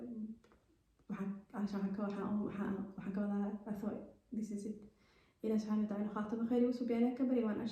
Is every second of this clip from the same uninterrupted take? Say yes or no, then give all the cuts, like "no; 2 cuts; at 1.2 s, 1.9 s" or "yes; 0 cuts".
yes; 0 cuts